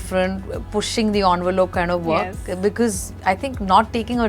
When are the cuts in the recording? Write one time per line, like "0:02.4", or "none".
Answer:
none